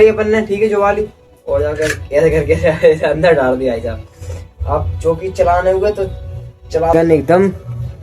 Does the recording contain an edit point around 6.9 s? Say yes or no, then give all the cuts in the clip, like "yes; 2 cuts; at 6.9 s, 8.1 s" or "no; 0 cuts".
yes; 1 cut; at 6.9 s